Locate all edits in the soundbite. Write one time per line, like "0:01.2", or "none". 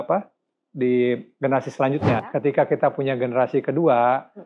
0:02.2